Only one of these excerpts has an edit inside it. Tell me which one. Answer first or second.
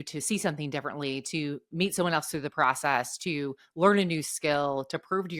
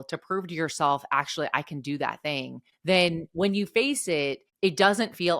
second